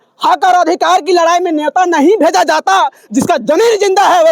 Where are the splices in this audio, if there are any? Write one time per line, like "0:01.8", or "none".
none